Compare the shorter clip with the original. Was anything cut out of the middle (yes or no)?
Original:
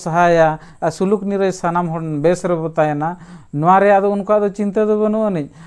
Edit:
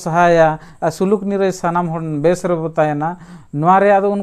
no